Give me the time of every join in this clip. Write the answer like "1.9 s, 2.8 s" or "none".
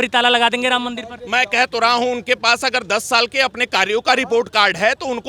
none